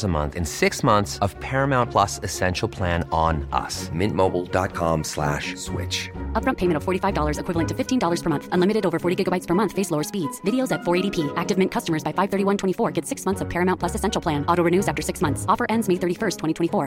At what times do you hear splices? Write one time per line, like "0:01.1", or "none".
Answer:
none